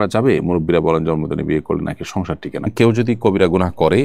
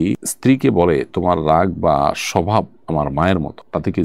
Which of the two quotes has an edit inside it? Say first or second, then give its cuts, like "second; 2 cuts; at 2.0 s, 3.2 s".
first; 1 cut; at 2.7 s